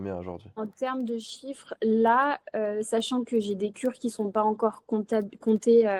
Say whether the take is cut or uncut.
uncut